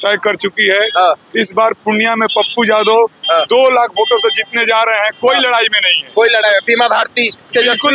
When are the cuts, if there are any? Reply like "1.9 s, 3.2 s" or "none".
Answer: none